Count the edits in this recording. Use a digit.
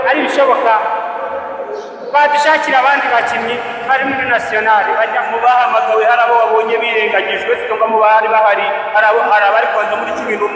0